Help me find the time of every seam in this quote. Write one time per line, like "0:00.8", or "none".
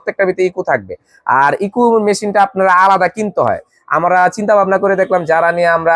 none

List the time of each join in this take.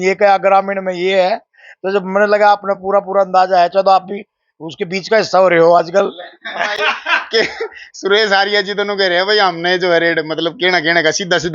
none

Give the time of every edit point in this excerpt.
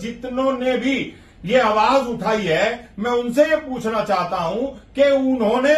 none

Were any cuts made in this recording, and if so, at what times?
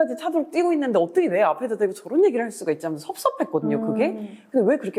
none

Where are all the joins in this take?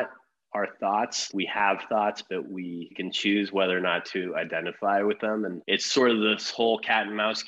0:01.2
0:03.0
0:05.6

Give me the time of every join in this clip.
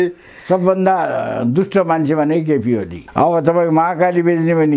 0:03.0

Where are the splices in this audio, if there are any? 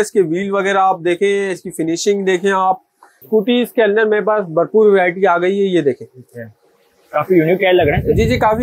0:03.2

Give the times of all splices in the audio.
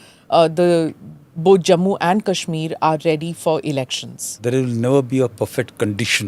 0:04.4

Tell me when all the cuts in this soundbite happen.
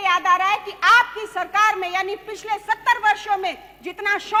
none

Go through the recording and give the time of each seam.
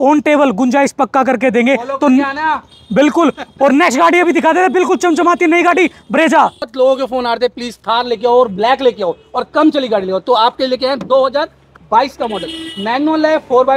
0:06.7

